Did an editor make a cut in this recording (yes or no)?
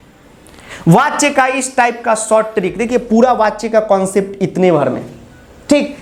no